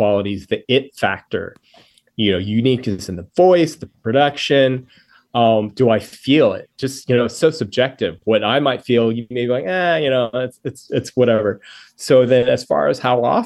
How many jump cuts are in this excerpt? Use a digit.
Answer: 0